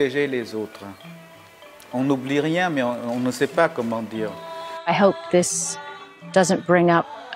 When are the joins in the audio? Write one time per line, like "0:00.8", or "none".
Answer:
0:04.9